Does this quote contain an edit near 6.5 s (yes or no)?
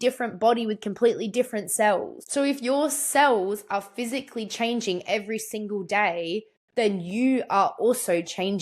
no